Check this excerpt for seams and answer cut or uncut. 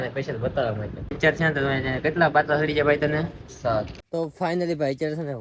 cut